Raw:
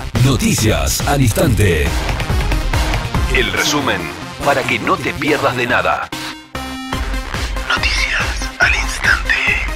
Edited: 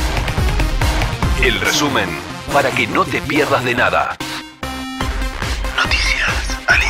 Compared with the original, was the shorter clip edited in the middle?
no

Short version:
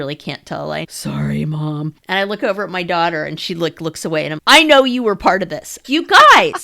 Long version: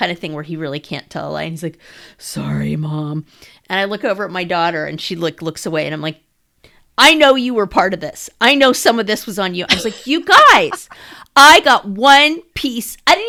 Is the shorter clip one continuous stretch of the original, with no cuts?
no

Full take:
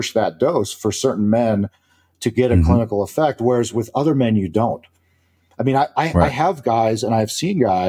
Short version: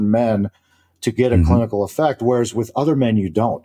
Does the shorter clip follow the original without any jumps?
yes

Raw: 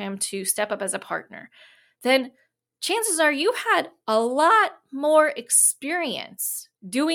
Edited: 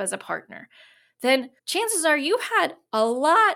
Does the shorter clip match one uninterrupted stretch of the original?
no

